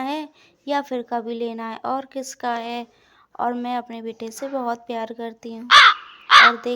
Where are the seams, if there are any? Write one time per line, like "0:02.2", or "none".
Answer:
0:05.6

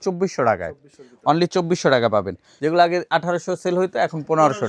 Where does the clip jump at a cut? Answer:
0:02.4

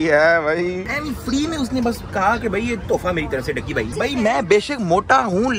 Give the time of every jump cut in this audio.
none

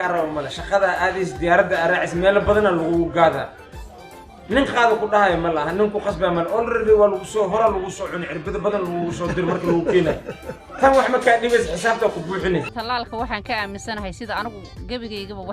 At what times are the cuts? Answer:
0:12.7

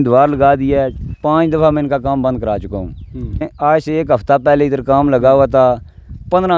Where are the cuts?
0:03.5

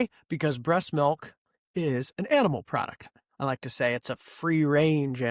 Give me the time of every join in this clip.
none

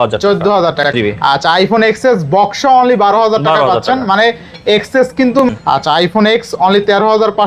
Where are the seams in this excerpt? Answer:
0:00.9
0:05.4

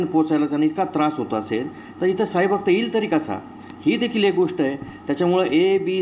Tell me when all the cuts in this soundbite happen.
none

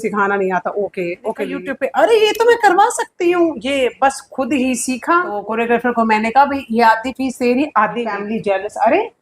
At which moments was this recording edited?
0:01.6
0:05.5
0:08.2

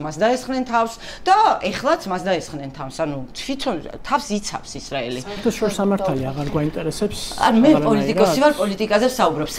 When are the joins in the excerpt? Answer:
none

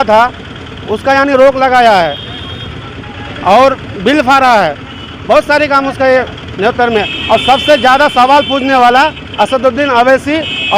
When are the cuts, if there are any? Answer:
none

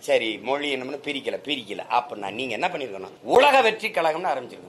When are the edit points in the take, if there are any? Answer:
0:03.1

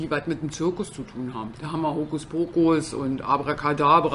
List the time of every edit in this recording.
0:01.6
0:02.9

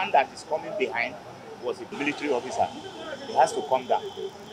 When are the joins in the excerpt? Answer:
0:01.9

